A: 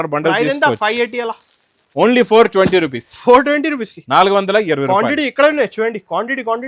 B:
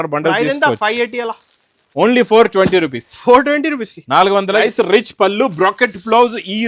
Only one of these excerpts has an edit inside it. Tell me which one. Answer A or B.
B